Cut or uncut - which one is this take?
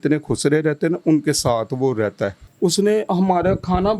cut